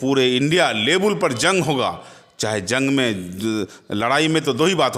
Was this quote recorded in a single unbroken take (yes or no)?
yes